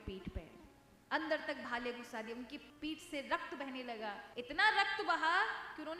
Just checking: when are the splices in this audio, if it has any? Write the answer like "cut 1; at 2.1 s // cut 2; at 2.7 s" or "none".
cut 1; at 2.6 s // cut 2; at 4.2 s